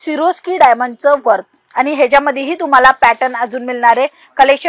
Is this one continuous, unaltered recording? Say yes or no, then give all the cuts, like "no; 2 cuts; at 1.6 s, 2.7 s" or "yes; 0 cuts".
yes; 0 cuts